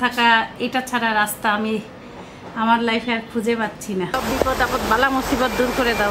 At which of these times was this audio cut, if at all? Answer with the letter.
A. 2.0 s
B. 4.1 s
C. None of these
B